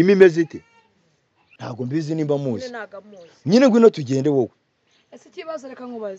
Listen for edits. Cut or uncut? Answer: cut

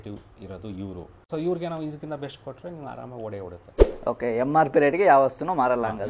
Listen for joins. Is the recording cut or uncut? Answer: cut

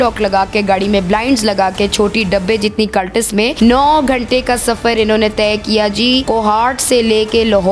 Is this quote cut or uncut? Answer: cut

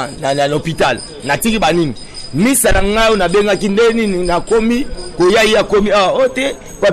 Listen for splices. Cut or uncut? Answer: uncut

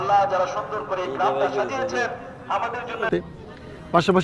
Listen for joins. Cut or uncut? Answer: cut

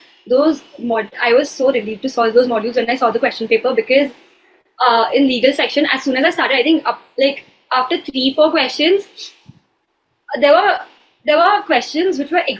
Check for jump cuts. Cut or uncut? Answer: uncut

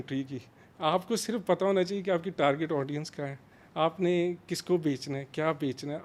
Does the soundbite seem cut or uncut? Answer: uncut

